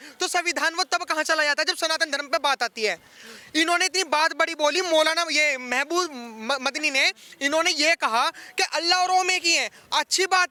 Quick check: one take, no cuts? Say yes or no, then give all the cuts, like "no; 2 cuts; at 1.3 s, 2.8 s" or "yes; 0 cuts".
yes; 0 cuts